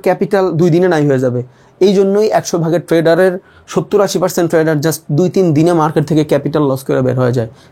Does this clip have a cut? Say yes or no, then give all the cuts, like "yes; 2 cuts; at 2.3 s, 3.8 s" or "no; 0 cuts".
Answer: no; 0 cuts